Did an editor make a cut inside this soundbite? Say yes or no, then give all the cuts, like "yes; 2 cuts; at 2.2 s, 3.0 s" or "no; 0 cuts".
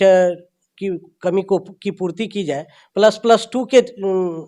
no; 0 cuts